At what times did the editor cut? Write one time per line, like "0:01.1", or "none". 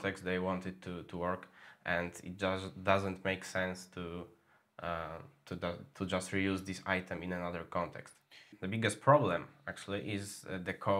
0:08.6

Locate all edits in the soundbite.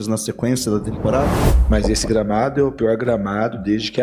0:01.5

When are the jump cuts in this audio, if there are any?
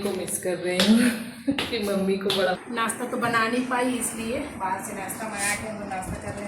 0:02.6

